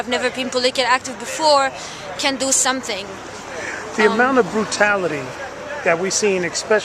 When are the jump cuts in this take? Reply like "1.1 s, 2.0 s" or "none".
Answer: 1.2 s

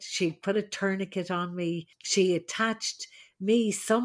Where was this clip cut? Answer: 2.0 s

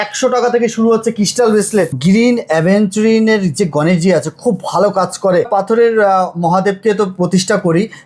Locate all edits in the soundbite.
2.0 s, 5.5 s

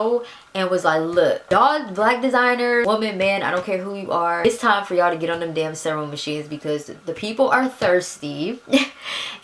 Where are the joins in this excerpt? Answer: 1.4 s, 2.8 s, 4.4 s

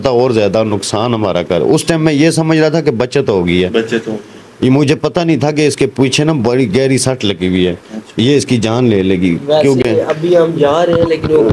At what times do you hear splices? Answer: none

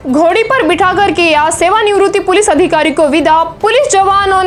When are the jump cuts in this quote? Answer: none

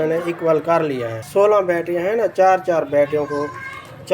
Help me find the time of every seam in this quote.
1.1 s

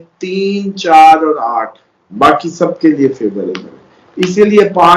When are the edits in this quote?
2.0 s

